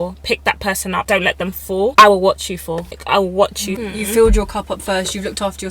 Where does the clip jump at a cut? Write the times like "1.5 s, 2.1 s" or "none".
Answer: 1.0 s, 1.9 s, 3.0 s, 3.8 s

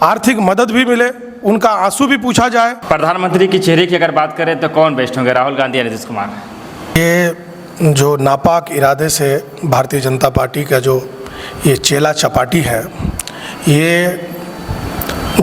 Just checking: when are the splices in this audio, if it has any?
2.8 s, 6.9 s

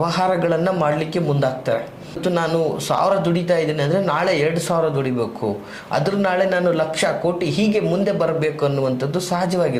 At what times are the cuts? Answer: 2.2 s

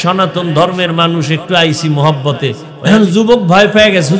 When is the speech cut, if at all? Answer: 2.7 s

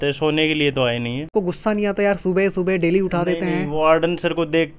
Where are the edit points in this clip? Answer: 1.3 s

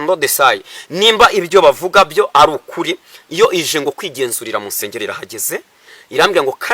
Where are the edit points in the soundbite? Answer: none

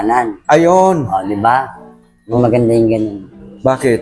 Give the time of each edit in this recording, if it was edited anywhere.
2.4 s

